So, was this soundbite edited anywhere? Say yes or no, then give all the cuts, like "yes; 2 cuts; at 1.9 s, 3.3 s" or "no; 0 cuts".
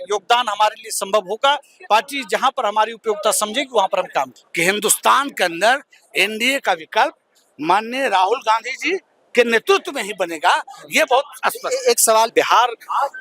yes; 2 cuts; at 4.4 s, 12.3 s